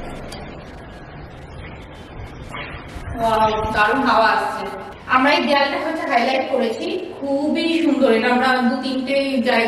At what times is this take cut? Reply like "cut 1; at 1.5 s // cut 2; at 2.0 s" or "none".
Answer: cut 1; at 5.0 s